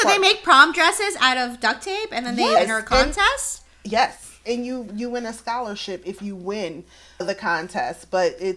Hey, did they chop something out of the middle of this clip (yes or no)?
no